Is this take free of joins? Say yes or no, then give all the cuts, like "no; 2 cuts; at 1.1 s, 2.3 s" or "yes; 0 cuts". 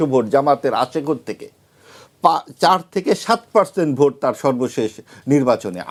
yes; 0 cuts